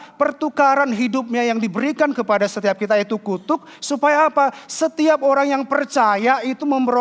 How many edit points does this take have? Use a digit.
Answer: 0